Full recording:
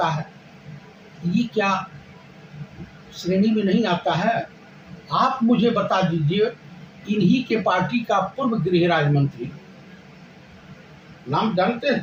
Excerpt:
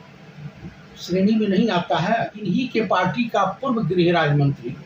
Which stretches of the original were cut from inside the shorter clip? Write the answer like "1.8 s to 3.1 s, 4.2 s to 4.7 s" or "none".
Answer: 4.5 s to 7.1 s